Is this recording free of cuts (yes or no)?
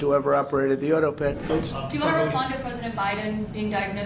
no